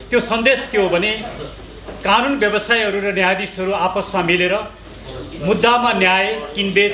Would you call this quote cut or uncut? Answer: uncut